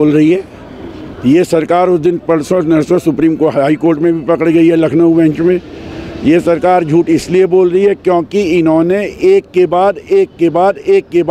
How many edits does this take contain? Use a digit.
0